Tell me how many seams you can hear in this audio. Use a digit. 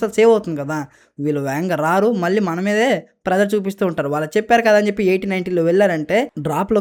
0